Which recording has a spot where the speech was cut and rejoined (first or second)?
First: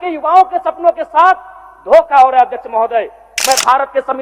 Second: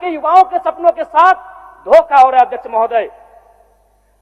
first